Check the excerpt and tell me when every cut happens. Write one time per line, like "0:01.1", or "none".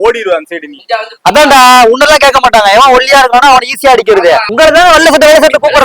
0:04.5